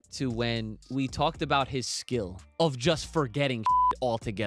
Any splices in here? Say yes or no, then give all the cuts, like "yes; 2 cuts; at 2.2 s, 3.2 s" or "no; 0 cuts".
yes; 2 cuts; at 0.9 s, 2.4 s